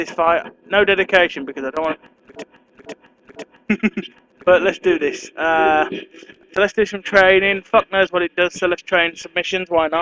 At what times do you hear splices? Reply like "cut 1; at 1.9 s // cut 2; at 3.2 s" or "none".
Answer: cut 1; at 8.9 s